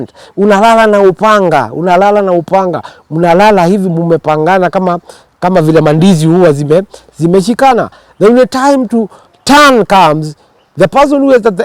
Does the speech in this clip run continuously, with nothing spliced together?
yes; 0 cuts

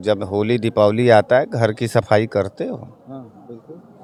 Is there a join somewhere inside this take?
no; 0 cuts

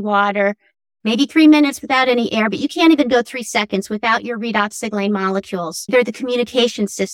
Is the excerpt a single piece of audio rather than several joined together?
no; 1 cut; at 5.9 s

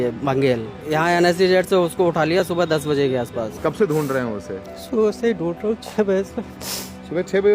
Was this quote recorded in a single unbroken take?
no; 2 cuts; at 0.8 s, 3.5 s

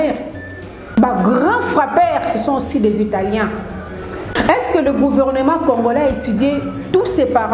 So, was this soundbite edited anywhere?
yes; 2 cuts; at 0.9 s, 4.3 s

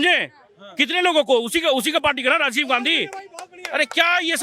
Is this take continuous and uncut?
yes; 0 cuts

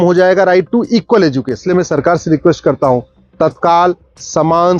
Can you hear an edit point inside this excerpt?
yes; 1 cut; at 1.6 s

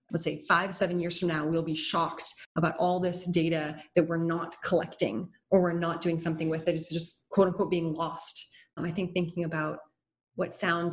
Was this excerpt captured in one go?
no; 1 cut; at 8.7 s

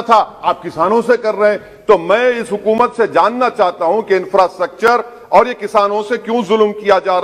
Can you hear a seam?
no; 0 cuts

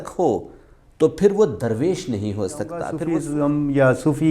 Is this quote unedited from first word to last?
no; 1 cut; at 2.9 s

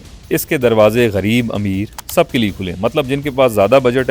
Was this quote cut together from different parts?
no; 0 cuts

